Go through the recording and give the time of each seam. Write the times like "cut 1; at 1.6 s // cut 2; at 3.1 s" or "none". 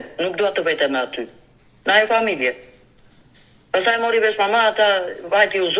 none